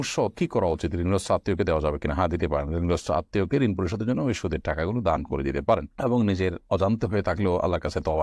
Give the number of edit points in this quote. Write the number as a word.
zero